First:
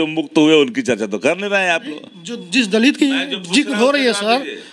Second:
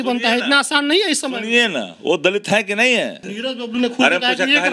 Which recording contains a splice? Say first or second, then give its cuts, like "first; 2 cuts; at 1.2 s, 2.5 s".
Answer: second; 1 cut; at 3.3 s